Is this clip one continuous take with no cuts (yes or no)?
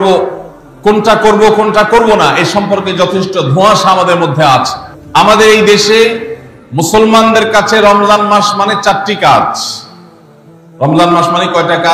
yes